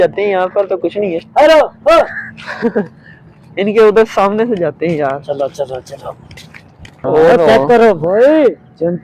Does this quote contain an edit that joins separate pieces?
yes; 1 cut; at 7.0 s

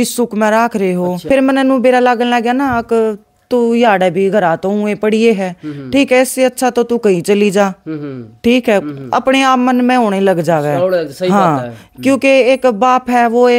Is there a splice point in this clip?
yes; 1 cut; at 1.2 s

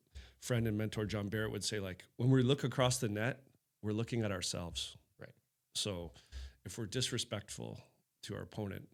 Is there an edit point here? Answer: no; 0 cuts

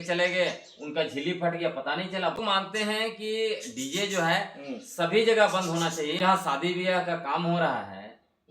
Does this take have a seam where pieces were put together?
yes; 2 cuts; at 2.4 s, 6.2 s

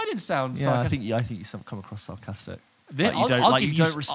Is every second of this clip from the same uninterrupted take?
yes; 0 cuts

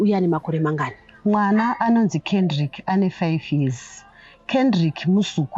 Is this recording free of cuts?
yes; 0 cuts

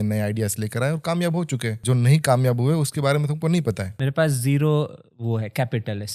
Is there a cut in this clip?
yes; 2 cuts; at 1.8 s, 3.9 s

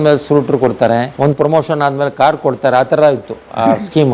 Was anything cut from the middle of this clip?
yes; 1 cut; at 1.1 s

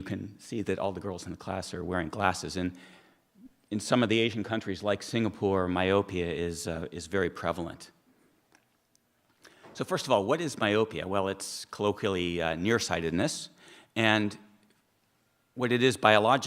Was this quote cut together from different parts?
no; 0 cuts

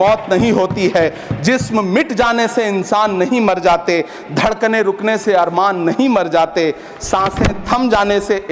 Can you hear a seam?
no; 0 cuts

